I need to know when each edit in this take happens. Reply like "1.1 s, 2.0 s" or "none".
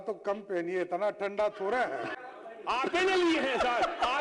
2.1 s